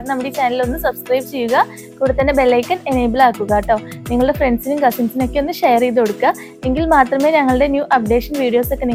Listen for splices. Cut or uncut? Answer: uncut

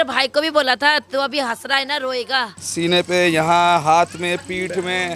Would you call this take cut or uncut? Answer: cut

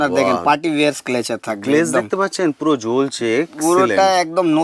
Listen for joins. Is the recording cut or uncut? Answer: uncut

